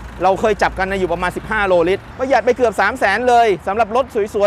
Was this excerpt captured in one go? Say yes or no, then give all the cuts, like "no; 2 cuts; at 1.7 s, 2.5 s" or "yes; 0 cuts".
no; 1 cut; at 2.1 s